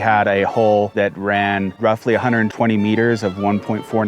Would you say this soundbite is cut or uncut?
cut